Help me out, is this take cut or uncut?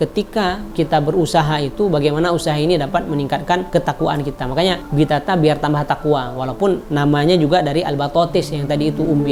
uncut